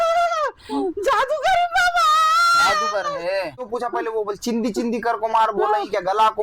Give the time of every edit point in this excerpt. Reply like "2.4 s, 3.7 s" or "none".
3.6 s